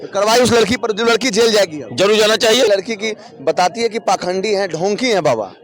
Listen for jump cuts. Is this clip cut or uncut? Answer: cut